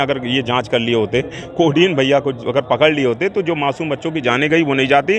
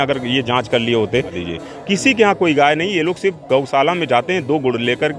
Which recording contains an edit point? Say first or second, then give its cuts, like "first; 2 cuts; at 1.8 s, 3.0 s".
second; 1 cut; at 1.4 s